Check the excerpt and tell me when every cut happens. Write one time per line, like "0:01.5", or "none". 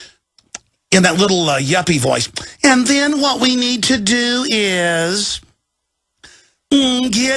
0:04.0